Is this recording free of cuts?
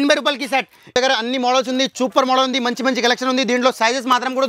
no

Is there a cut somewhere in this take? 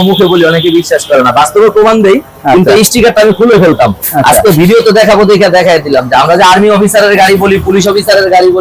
no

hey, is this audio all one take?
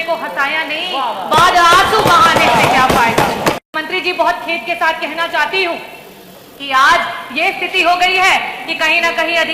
no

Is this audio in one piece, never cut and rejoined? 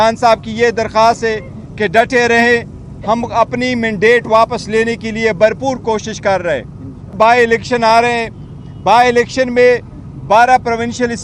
no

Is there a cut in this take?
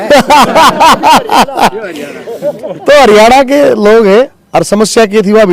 yes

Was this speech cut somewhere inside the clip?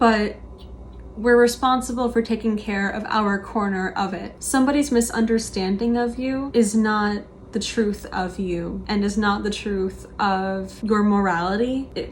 yes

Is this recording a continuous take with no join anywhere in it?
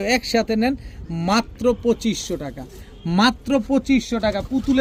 yes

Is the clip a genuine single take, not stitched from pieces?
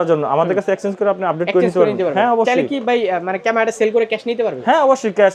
yes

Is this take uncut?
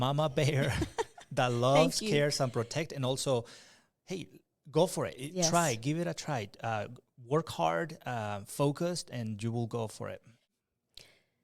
no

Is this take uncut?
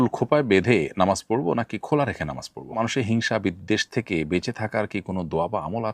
no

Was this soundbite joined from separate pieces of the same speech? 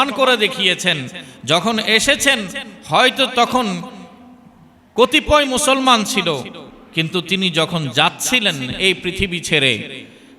no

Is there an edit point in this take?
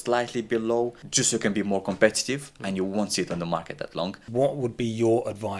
yes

